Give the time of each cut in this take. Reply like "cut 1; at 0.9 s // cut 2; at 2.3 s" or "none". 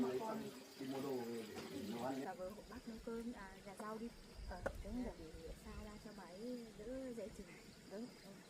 cut 1; at 2.3 s